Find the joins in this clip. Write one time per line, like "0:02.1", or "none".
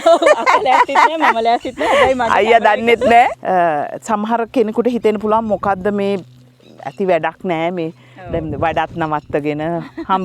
0:03.3